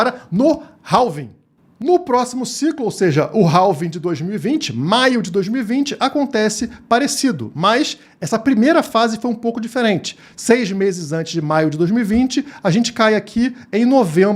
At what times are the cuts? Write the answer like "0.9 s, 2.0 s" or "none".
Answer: none